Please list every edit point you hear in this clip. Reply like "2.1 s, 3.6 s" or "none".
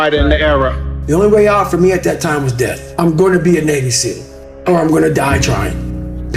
2.8 s